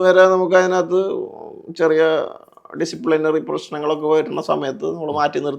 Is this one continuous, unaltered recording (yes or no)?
yes